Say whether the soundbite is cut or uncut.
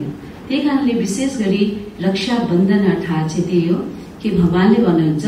uncut